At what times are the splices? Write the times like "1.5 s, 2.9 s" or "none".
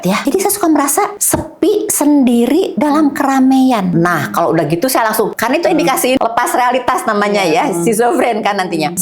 none